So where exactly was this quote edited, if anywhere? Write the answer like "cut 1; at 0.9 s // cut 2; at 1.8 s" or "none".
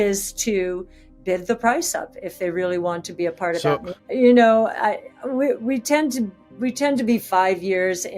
cut 1; at 3.9 s

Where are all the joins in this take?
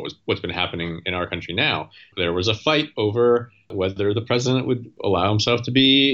cut 1; at 2.1 s // cut 2; at 3.7 s // cut 3; at 4.9 s

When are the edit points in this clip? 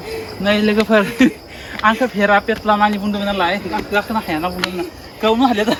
none

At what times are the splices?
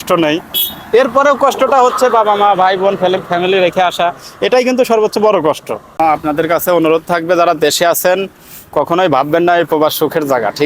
cut 1; at 5.9 s

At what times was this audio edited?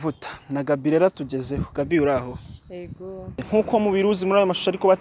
cut 1; at 3.5 s

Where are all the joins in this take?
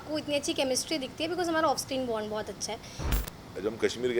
cut 1; at 3.2 s

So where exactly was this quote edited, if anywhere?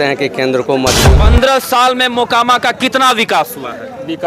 cut 1; at 1.1 s

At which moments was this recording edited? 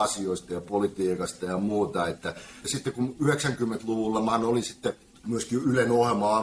cut 1; at 2.6 s // cut 2; at 5.1 s

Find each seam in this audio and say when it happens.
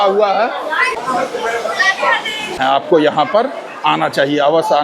cut 1; at 0.9 s // cut 2; at 2.6 s

